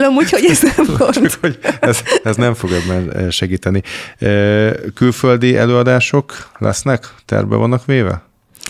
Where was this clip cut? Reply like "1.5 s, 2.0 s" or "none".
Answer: none